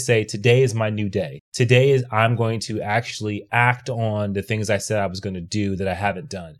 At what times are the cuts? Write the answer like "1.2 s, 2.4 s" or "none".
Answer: 1.4 s